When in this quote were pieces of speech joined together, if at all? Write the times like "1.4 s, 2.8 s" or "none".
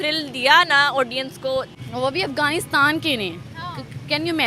1.7 s